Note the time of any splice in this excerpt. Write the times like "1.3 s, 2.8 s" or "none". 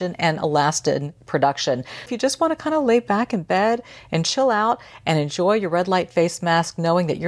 2.1 s